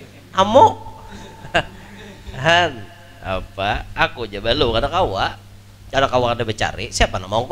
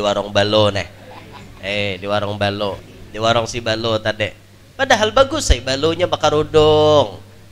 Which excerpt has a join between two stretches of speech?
second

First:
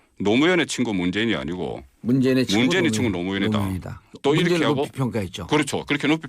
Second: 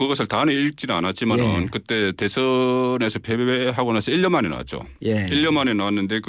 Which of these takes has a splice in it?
second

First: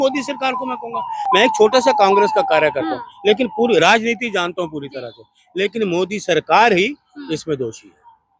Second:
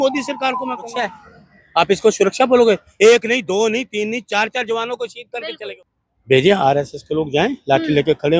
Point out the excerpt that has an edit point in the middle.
second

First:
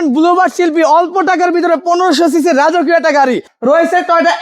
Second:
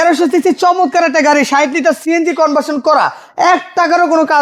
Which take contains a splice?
first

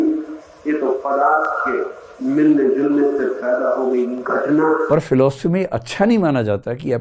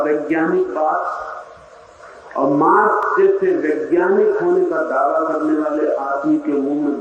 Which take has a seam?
first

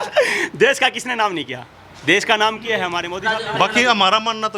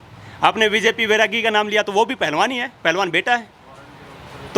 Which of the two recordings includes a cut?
first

